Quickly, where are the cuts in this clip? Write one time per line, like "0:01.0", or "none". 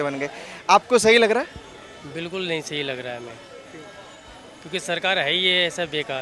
none